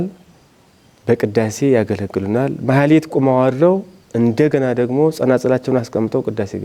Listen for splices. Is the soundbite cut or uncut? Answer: uncut